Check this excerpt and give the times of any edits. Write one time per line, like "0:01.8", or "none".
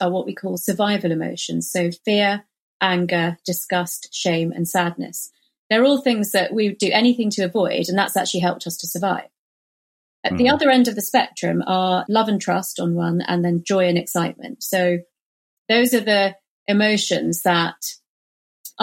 0:12.0